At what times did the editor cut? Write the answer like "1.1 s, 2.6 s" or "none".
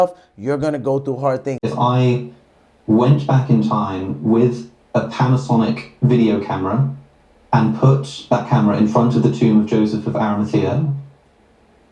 1.7 s